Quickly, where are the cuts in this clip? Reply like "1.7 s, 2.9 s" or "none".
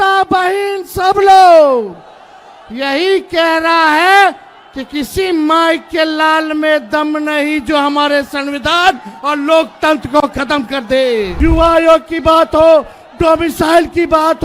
11.3 s